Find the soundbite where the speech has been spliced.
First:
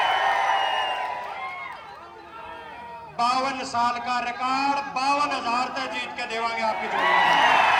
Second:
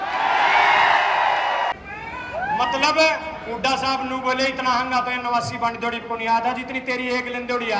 second; 1 cut; at 1.8 s

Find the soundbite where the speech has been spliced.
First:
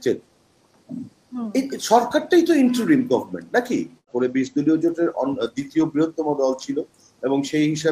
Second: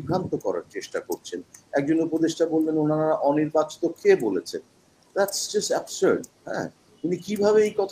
first; 1 cut; at 4.1 s

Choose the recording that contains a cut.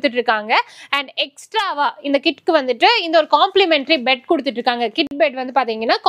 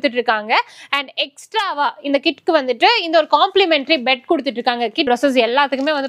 second; 1 cut; at 5.1 s

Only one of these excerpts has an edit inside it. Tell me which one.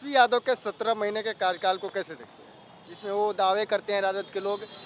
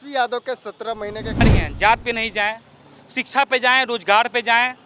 second; 1 cut; at 1.4 s

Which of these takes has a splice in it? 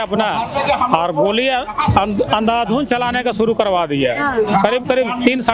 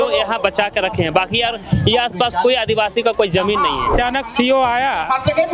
second; 1 cut; at 3.9 s

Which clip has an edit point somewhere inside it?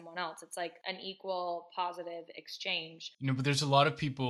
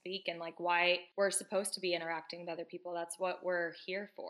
first; 1 cut; at 3.0 s

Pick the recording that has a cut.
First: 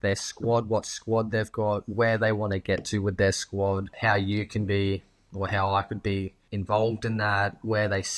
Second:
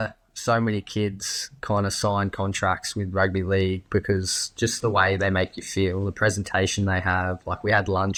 first; 2 cuts; at 3.9 s, 6.4 s

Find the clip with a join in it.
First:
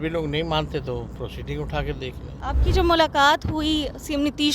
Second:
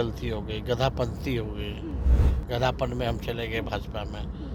first; 1 cut; at 2.4 s

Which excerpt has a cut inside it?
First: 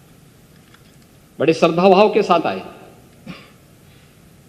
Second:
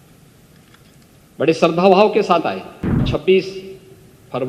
second; 1 cut; at 3.0 s

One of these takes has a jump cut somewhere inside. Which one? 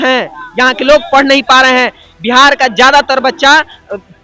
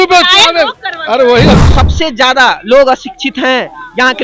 second; 1 cut; at 1.7 s

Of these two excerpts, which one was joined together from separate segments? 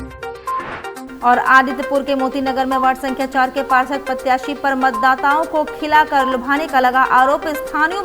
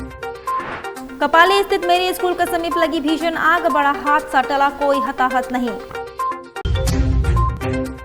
first; 1 cut; at 0.9 s

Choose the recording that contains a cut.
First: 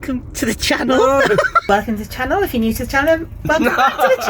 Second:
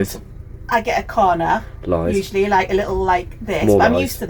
first; 1 cut; at 1.6 s

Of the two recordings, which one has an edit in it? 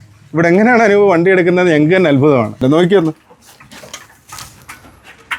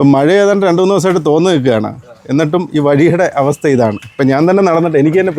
first; 1 cut; at 2.6 s

